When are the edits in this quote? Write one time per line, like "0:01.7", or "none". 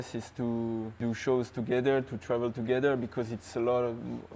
0:01.0

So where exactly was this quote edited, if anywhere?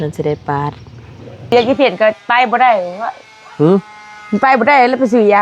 0:01.5

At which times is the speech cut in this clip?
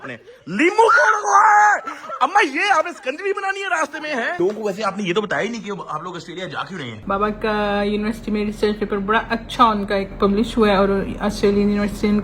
0:04.4
0:06.9

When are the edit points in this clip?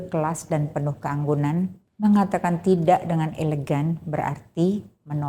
0:01.8

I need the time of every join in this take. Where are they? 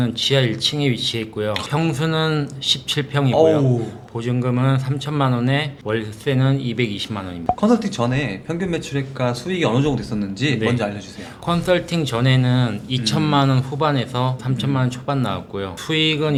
none

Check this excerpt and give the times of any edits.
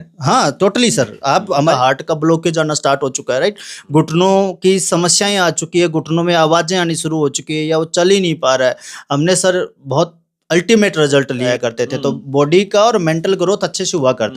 0:01.7
0:11.5

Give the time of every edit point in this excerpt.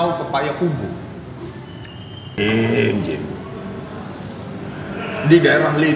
0:02.4

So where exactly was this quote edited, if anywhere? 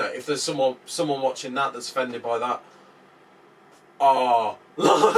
none

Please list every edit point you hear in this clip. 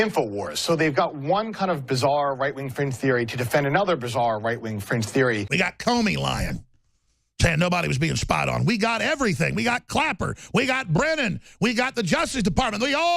0:05.5

